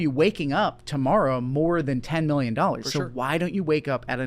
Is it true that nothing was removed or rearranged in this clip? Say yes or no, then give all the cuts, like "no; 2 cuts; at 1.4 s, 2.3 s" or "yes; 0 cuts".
yes; 0 cuts